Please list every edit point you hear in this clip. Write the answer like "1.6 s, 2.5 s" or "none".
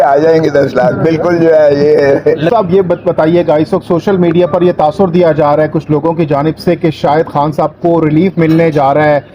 2.4 s